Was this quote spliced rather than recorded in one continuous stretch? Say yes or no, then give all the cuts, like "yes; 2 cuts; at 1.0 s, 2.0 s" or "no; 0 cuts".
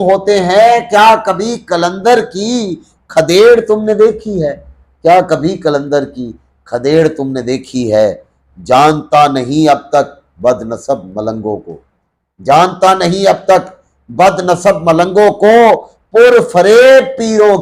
no; 0 cuts